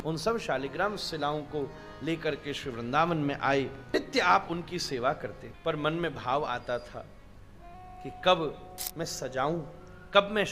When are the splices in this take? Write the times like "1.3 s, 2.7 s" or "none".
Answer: 3.8 s, 5.4 s